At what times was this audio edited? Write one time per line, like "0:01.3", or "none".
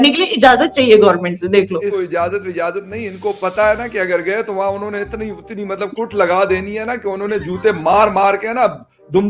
0:01.9